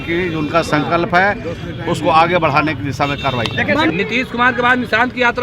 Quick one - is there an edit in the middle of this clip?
yes; 1 cut; at 3.9 s

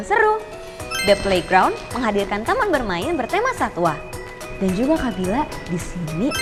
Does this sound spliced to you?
no; 0 cuts

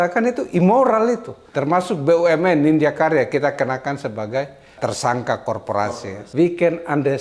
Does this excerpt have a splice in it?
yes; 2 cuts; at 1.5 s, 5.8 s

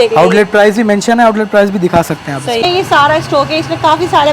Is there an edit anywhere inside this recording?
yes; 1 cut; at 2.6 s

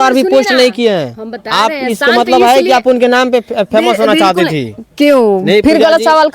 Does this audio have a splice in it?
no; 0 cuts

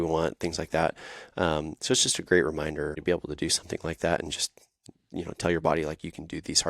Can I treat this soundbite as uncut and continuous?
no; 1 cut; at 3.0 s

